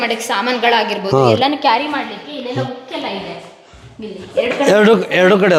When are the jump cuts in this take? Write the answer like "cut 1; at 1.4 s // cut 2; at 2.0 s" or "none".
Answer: none